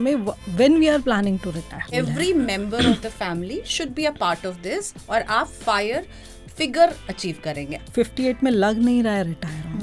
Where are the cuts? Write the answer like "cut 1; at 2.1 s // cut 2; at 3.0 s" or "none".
cut 1; at 1.9 s // cut 2; at 7.7 s